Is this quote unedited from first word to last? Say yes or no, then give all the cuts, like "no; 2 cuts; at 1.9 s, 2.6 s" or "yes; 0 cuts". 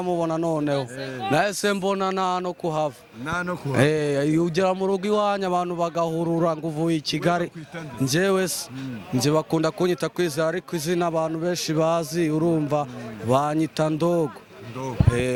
yes; 0 cuts